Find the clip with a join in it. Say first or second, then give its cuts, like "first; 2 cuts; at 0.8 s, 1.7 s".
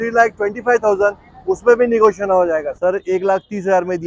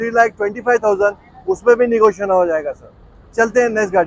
first; 1 cut; at 2.7 s